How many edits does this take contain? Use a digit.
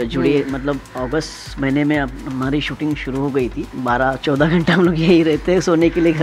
1